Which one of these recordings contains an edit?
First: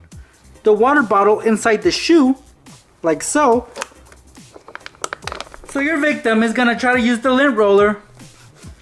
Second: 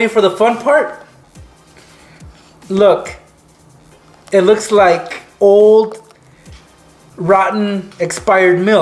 first; 1 cut; at 5.6 s

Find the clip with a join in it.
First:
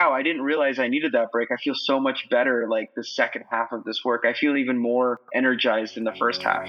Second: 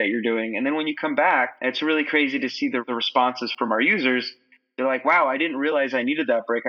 second; 1 cut; at 3.5 s

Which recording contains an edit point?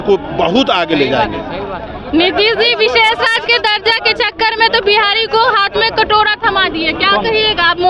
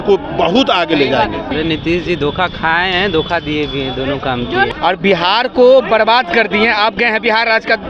second; 2 cuts; at 1.5 s, 4.7 s

